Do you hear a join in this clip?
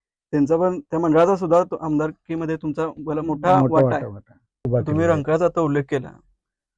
yes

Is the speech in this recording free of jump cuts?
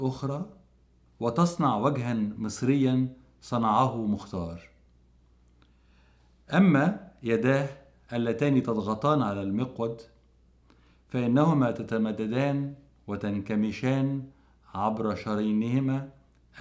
yes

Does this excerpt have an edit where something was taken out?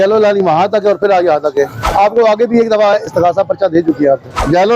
no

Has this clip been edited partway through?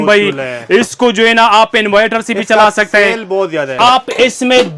yes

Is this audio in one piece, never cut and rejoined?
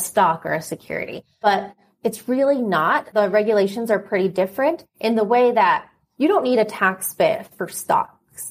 no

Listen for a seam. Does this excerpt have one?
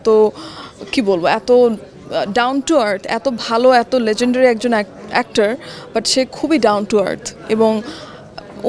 no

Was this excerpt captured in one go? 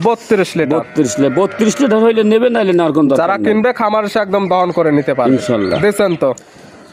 yes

